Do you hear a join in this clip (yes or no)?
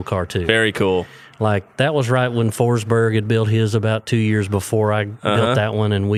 no